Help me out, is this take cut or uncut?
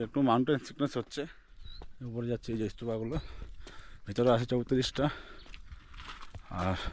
cut